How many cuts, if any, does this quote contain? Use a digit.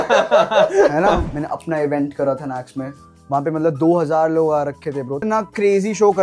2